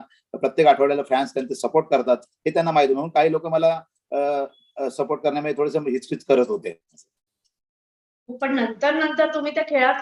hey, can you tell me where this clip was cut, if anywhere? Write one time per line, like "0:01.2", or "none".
none